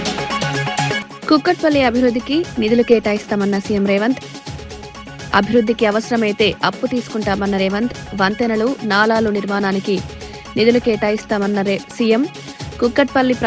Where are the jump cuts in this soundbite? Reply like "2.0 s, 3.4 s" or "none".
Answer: 1.1 s